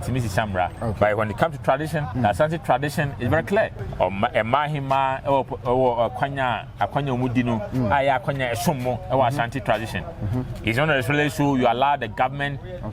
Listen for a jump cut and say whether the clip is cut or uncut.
cut